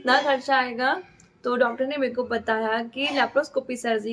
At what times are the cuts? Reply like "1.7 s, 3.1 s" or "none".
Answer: none